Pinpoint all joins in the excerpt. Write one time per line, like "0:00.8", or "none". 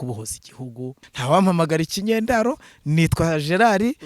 0:01.1